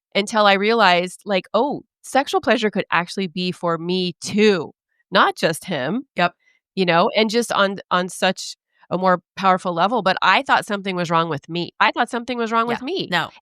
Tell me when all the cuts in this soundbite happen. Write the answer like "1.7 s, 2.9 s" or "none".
11.7 s